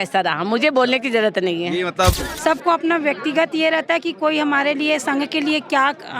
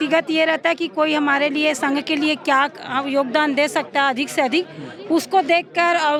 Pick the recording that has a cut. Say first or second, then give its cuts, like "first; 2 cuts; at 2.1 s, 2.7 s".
first; 1 cut; at 2.1 s